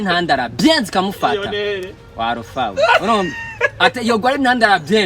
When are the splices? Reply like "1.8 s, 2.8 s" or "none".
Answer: none